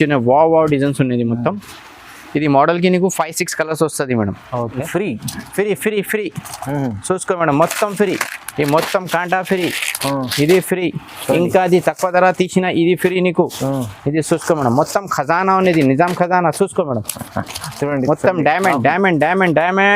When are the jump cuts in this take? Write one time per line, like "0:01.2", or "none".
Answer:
0:04.8